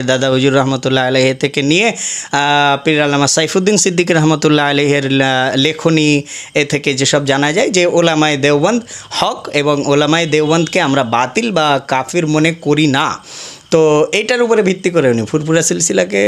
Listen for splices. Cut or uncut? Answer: uncut